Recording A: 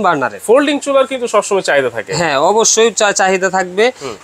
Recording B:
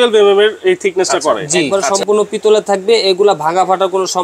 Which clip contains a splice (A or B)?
B